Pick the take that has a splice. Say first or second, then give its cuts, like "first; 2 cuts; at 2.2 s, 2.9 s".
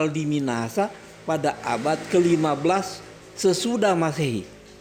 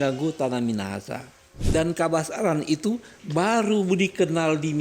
second; 1 cut; at 1.6 s